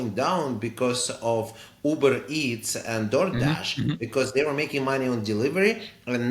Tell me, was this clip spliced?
no; 0 cuts

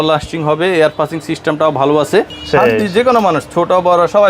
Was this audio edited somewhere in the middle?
yes; 1 cut; at 2.4 s

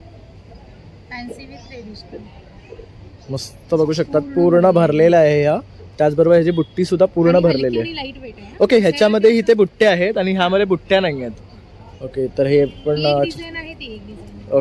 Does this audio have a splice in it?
no; 0 cuts

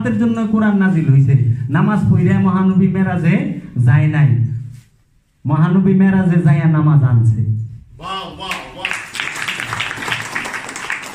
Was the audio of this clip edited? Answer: no; 0 cuts

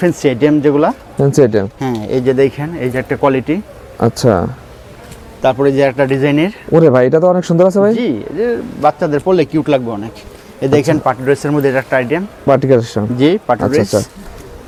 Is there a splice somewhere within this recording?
no; 0 cuts

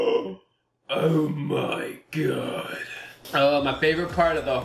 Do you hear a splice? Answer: no; 0 cuts

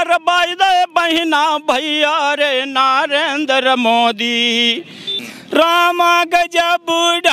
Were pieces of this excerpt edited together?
yes; 1 cut; at 5.1 s

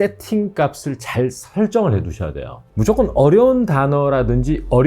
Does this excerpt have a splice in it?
yes; 1 cut; at 2.7 s

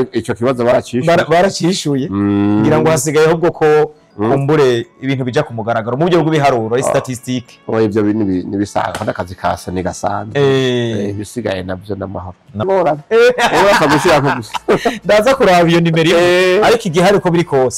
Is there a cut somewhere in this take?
yes; 1 cut; at 12.6 s

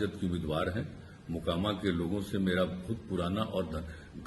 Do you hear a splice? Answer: no; 0 cuts

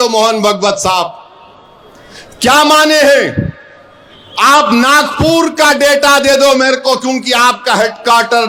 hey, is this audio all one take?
yes; 0 cuts

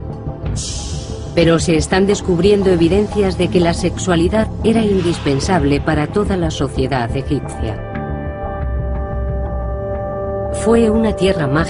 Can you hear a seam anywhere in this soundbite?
no; 0 cuts

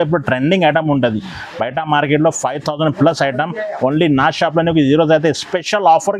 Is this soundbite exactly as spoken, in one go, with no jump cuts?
yes; 0 cuts

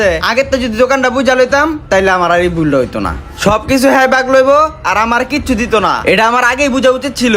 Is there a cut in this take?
no; 0 cuts

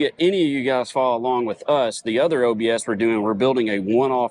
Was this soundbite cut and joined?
no; 0 cuts

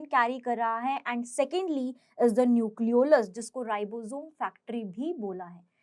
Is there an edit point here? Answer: no; 0 cuts

